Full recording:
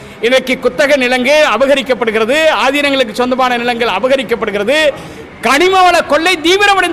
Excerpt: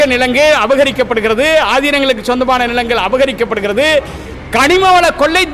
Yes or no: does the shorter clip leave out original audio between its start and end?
no